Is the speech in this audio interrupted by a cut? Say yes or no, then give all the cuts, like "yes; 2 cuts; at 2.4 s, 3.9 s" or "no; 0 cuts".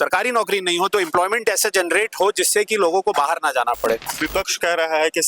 yes; 1 cut; at 4.1 s